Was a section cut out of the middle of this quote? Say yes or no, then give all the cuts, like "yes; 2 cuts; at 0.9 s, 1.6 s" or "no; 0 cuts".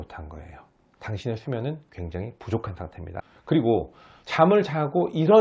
yes; 1 cut; at 3.3 s